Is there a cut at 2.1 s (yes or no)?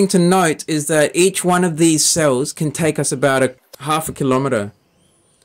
no